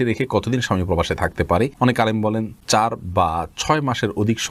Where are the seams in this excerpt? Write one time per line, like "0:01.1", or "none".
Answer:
0:01.7
0:02.5